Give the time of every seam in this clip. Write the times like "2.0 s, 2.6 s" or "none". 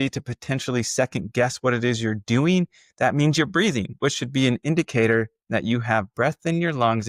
none